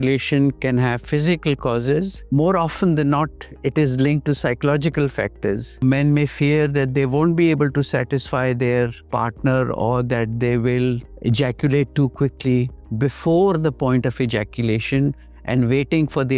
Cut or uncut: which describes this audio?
cut